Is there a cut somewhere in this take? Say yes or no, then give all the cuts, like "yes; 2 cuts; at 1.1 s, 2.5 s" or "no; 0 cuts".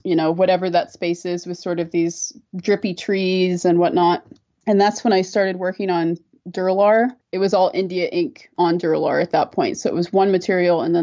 no; 0 cuts